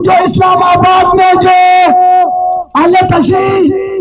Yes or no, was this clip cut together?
no